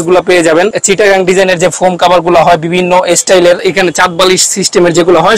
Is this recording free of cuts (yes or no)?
no